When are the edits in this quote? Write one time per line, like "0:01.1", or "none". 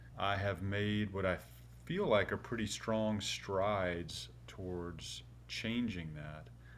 none